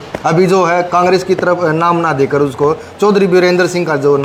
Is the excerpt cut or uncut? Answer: uncut